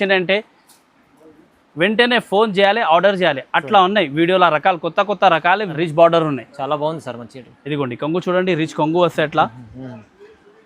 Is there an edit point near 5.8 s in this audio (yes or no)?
yes